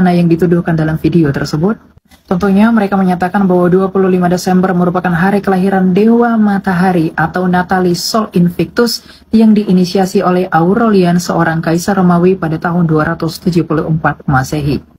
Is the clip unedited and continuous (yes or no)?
yes